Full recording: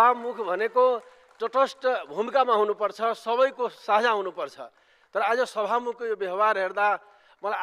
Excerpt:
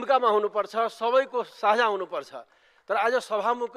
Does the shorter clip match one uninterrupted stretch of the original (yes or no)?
yes